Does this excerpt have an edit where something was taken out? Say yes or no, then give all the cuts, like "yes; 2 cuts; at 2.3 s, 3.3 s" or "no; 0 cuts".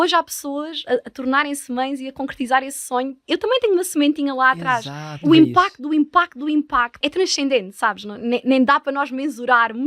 yes; 3 cuts; at 3.2 s, 5.2 s, 7.0 s